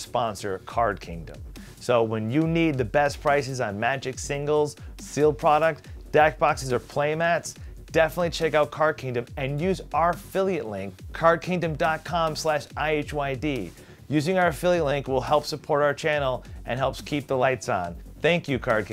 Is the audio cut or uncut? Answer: cut